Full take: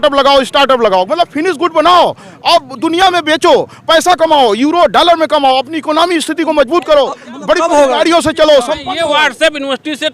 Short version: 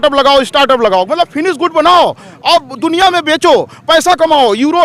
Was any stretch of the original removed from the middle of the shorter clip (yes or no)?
no